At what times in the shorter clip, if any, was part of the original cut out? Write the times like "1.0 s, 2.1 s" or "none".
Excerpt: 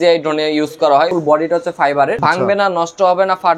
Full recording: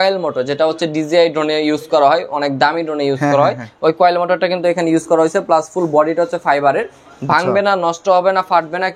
1.1 s, 2.2 s